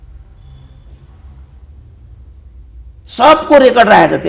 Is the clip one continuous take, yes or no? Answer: yes